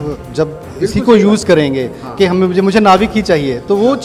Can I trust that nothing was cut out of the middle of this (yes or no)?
yes